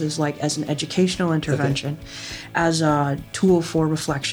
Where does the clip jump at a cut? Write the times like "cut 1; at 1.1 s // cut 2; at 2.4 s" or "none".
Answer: cut 1; at 3.0 s